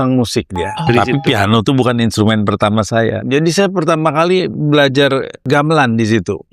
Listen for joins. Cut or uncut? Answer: cut